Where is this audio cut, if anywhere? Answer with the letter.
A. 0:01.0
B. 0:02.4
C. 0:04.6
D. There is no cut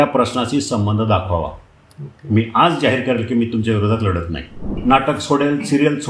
C